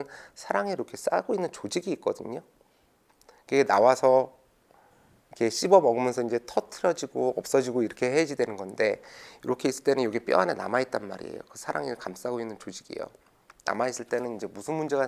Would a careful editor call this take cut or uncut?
uncut